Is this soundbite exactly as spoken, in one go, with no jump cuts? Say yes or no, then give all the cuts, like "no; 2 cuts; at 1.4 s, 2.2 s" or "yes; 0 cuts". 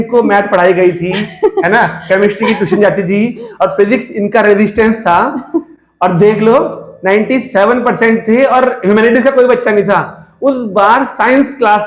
yes; 0 cuts